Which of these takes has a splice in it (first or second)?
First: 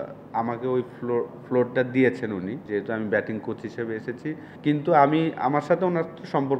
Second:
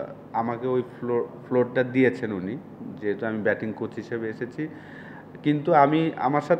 first